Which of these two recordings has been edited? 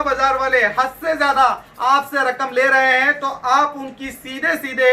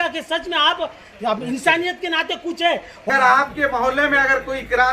second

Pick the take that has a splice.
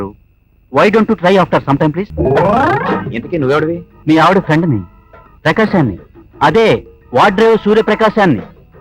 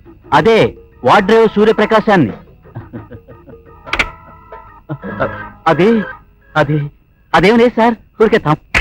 first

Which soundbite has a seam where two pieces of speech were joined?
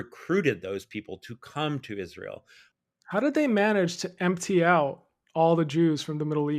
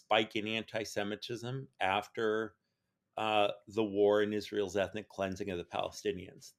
first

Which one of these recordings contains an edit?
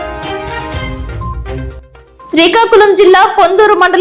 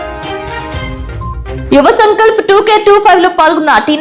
second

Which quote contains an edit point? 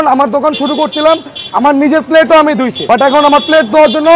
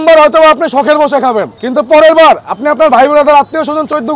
first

